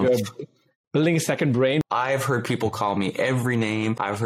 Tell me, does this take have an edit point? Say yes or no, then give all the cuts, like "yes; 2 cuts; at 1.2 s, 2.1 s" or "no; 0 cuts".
yes; 1 cut; at 1.8 s